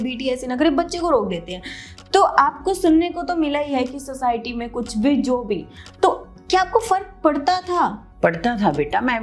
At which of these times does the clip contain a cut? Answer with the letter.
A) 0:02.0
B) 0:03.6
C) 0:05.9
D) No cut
D